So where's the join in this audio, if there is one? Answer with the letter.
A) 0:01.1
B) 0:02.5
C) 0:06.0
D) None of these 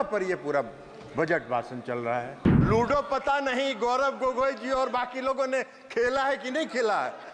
B